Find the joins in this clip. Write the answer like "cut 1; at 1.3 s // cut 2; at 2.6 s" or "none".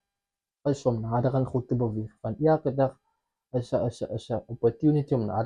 none